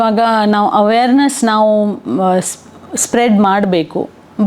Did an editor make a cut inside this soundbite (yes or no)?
no